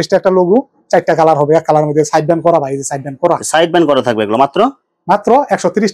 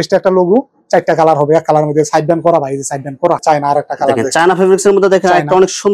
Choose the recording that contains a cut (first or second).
second